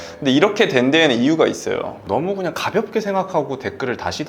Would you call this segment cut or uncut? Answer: cut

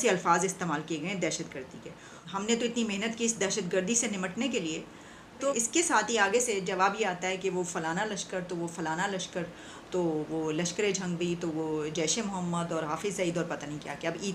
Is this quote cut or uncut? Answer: uncut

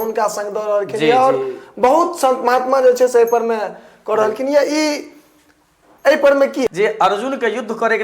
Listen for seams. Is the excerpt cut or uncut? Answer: cut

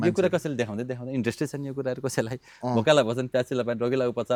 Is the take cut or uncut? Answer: uncut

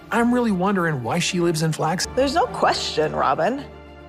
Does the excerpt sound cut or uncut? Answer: cut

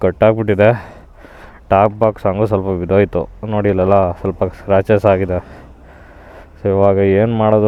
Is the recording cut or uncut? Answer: uncut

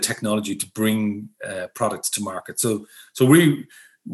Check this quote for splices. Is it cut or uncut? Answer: uncut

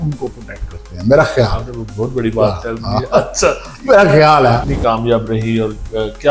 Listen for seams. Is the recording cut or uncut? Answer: cut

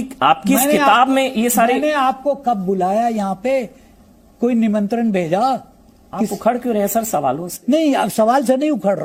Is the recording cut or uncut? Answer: uncut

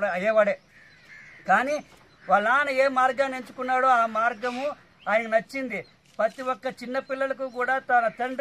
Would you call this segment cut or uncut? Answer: uncut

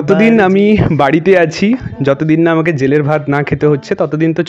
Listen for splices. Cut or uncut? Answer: uncut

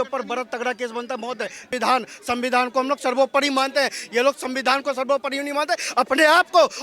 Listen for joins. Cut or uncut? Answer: cut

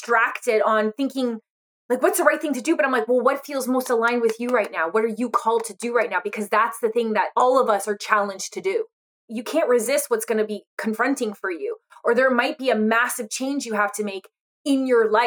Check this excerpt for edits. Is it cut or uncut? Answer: cut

